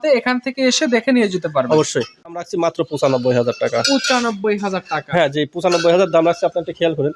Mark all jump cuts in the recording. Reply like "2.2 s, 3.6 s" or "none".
2.4 s